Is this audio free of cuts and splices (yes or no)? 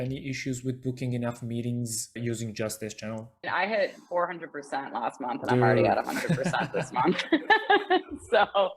no